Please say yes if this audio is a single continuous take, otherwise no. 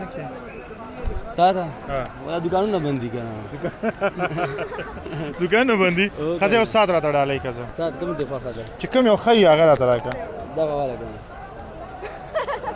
yes